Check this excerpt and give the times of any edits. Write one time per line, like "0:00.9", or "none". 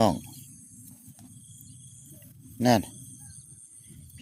none